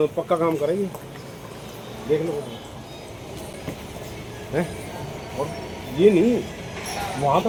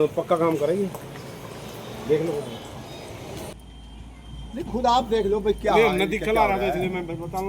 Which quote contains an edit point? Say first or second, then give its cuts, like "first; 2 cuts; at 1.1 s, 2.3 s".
second; 1 cut; at 3.5 s